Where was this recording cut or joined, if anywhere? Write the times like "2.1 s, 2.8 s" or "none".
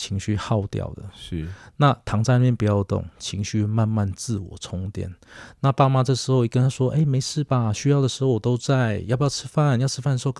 none